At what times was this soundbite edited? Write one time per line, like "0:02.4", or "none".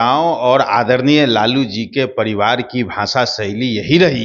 none